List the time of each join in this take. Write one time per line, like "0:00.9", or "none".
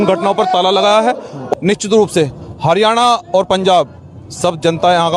0:01.4